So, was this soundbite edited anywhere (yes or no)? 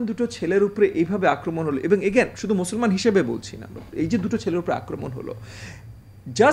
no